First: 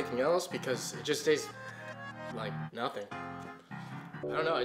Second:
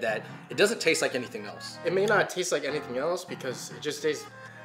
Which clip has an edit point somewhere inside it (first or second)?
second